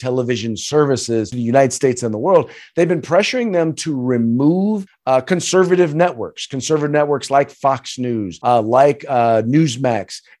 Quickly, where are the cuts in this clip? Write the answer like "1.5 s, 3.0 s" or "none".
1.3 s, 4.9 s, 8.3 s